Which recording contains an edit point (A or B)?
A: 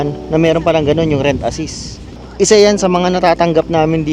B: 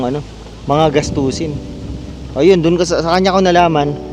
A